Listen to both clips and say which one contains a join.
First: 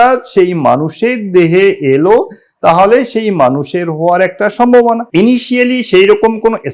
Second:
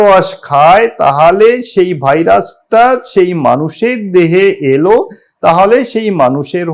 first; 1 cut; at 5.0 s

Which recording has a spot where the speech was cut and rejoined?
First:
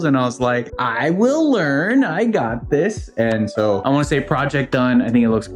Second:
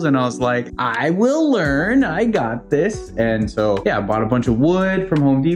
first; 1 cut; at 3.8 s

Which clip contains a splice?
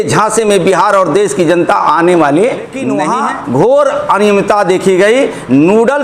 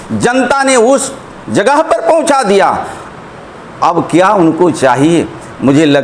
first; 1 cut; at 3.0 s

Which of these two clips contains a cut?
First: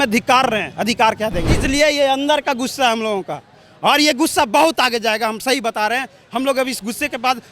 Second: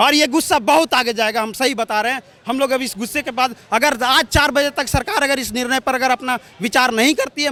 first; 1 cut; at 1.6 s

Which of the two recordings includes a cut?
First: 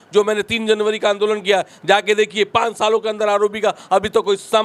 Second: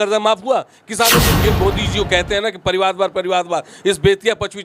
second; 1 cut; at 1.3 s

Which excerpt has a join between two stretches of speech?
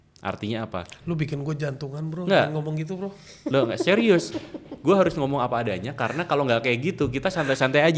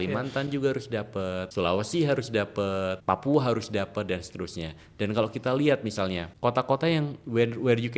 second; 3 cuts; at 1.5 s, 3.0 s, 6.3 s

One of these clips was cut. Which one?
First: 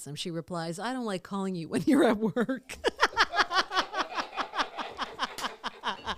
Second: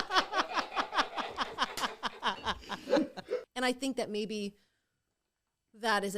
second; 1 cut; at 3.5 s

